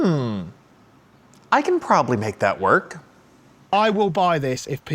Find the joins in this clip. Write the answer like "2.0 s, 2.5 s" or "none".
3.7 s